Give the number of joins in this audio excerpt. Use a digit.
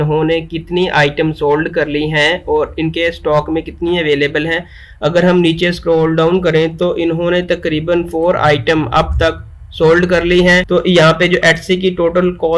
1